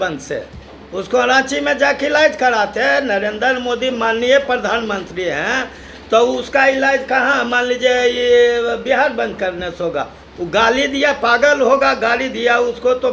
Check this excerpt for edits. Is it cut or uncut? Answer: uncut